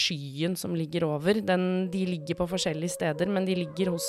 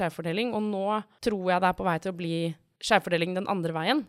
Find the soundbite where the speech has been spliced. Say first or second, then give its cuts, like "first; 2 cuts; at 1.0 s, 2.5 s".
second; 2 cuts; at 1.1 s, 2.7 s